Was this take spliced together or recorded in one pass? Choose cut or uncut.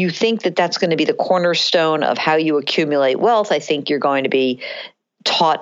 uncut